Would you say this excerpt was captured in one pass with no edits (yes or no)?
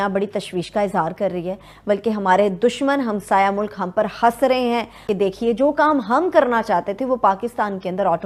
yes